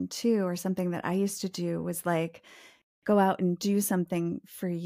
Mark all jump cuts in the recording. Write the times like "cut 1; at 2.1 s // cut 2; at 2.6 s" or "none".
none